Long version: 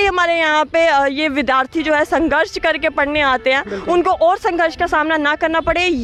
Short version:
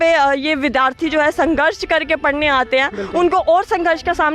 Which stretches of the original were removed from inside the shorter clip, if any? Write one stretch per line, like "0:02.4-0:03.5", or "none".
none